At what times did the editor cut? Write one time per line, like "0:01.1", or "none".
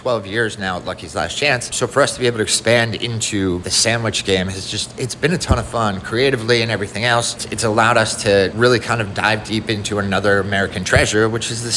0:01.7
0:03.7
0:07.4
0:08.5